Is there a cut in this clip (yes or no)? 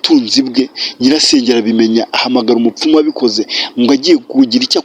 no